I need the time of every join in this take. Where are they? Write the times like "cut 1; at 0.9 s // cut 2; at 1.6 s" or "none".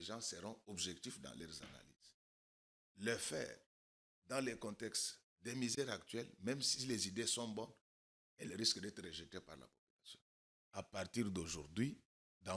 cut 1; at 10.6 s